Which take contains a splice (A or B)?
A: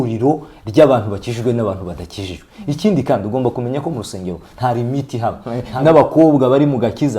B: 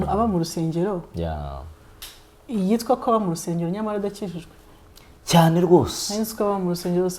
A